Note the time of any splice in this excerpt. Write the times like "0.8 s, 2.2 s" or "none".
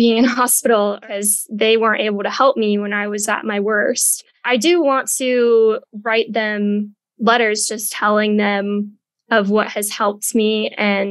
1.1 s